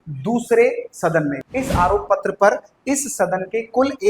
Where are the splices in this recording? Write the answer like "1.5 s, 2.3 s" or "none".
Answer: 1.4 s